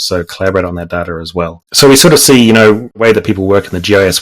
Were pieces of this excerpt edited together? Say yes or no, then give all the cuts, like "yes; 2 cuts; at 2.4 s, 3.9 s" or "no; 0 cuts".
yes; 2 cuts; at 1.6 s, 3.0 s